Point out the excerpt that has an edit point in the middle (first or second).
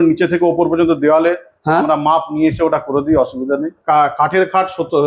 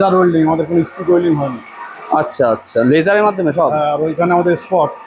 first